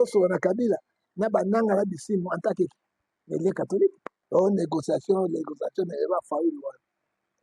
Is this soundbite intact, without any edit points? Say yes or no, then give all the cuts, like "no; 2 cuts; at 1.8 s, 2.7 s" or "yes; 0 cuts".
no; 1 cut; at 4.1 s